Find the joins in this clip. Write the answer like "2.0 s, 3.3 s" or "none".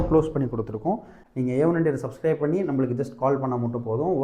1.2 s